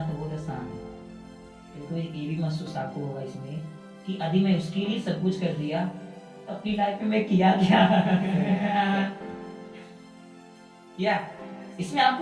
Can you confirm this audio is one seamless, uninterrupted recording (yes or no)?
yes